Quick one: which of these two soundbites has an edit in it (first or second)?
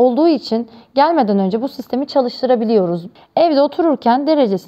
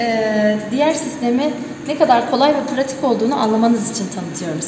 first